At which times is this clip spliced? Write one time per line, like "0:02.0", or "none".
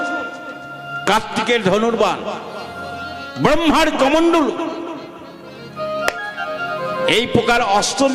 none